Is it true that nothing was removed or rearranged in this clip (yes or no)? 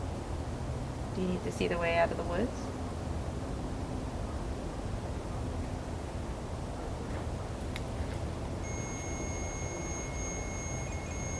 yes